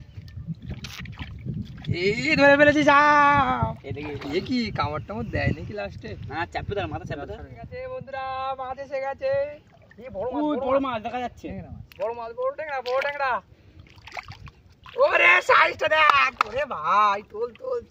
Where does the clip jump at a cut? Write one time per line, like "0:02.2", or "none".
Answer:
0:07.8